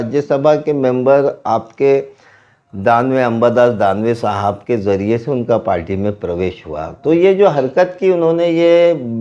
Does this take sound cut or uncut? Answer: uncut